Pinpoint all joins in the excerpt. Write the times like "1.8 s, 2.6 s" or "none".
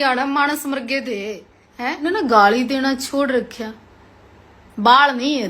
2.0 s